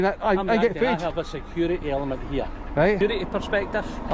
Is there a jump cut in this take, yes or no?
yes